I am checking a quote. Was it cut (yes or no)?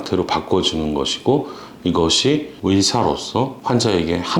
no